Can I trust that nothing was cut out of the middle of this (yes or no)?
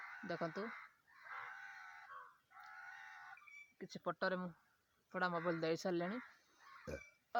yes